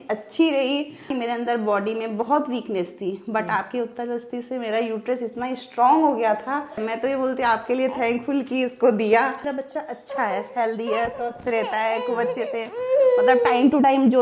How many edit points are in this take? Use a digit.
3